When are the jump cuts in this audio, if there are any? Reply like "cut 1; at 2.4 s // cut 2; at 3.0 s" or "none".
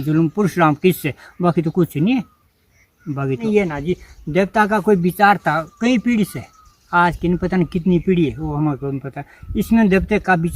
cut 1; at 3.4 s